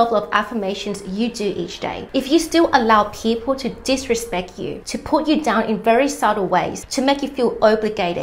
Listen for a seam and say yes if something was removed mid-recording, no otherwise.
yes